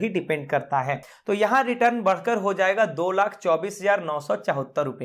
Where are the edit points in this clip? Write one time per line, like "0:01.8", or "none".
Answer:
0:01.0